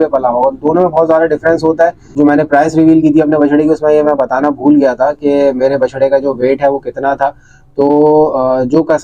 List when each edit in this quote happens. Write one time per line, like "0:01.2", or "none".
0:02.2